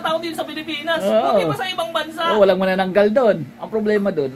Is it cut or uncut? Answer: uncut